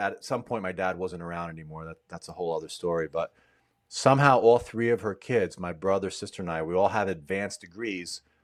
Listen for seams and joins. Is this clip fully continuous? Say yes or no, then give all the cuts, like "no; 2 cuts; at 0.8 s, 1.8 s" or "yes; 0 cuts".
yes; 0 cuts